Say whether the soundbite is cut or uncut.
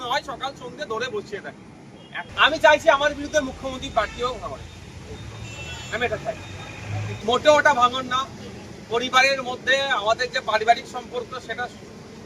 cut